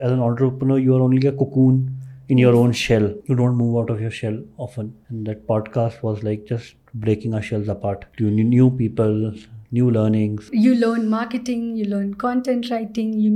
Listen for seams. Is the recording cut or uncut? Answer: uncut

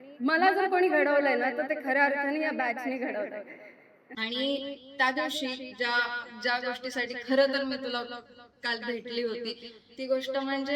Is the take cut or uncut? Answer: cut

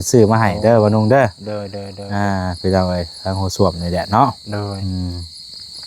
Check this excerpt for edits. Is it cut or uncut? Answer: uncut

